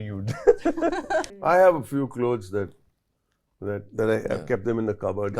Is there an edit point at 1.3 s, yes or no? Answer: yes